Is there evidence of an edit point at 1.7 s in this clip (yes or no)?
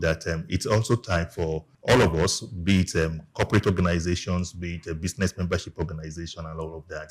yes